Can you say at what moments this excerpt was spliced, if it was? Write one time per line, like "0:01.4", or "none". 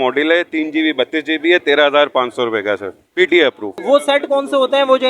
0:03.7

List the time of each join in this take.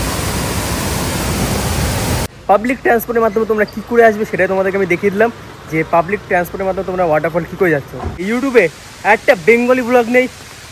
0:02.3
0:08.2

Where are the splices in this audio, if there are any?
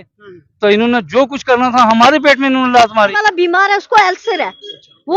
0:03.2

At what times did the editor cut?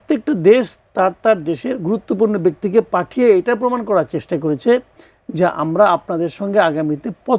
none

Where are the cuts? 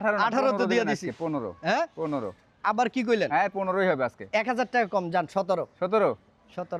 none

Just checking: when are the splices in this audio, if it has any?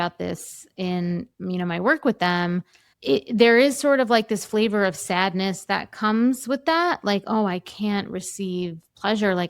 none

